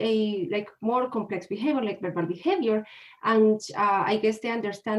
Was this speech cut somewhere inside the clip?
no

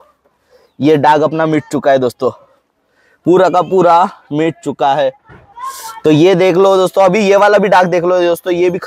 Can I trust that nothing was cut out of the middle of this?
yes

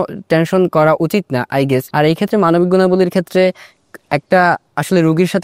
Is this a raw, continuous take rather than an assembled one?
no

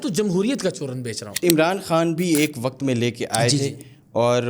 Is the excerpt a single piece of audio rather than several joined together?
no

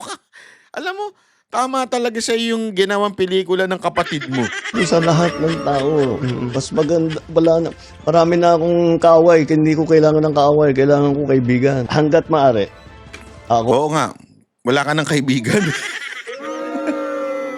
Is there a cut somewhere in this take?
yes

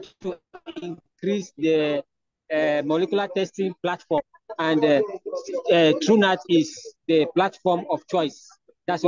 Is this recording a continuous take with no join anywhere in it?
yes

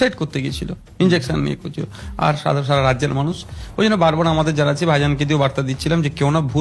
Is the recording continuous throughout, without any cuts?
yes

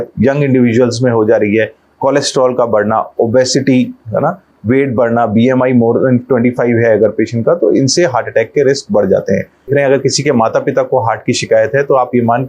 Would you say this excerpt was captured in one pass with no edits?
no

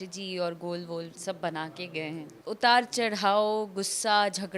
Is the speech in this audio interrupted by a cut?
yes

